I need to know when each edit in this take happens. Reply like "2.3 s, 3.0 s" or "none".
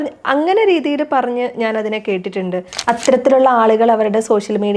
2.7 s